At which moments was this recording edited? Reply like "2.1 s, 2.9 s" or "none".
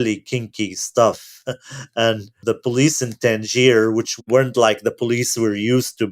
2.3 s, 4.2 s